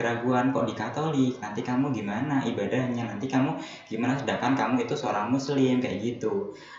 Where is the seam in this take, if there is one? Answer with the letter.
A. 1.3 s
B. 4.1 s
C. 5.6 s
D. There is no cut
D